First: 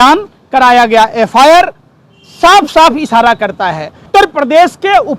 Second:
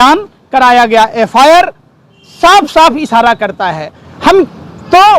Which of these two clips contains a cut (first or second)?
first